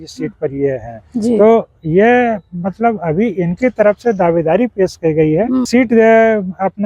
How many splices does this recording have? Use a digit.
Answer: 1